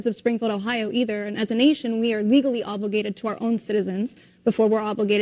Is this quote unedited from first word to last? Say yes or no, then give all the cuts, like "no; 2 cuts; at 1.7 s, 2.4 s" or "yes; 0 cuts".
yes; 0 cuts